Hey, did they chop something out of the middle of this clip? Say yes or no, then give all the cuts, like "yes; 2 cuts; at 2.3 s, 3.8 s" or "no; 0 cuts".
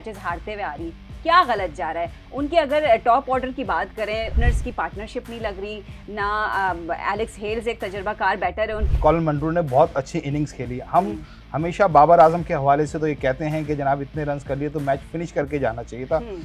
yes; 2 cuts; at 4.3 s, 8.8 s